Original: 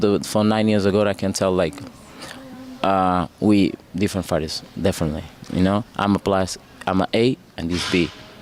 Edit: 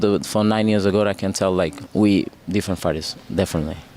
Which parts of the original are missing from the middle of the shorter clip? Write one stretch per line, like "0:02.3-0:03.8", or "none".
0:01.8-0:03.3